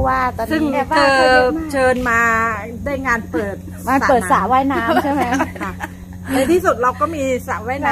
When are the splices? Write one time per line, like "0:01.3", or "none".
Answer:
none